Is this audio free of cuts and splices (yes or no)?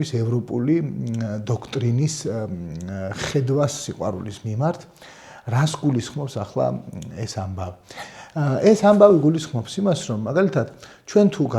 yes